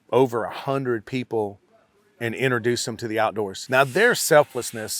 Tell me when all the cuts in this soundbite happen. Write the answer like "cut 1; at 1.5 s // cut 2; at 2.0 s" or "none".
cut 1; at 3.6 s